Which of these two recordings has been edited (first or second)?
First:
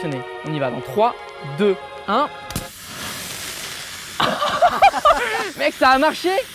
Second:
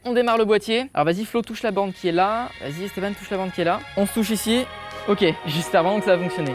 second